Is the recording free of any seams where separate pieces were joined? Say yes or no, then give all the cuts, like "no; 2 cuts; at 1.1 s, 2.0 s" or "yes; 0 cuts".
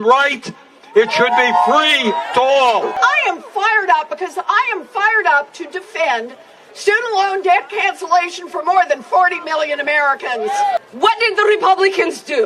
no; 2 cuts; at 3.0 s, 10.8 s